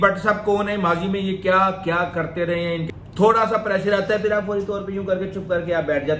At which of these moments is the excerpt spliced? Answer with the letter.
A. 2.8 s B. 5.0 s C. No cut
A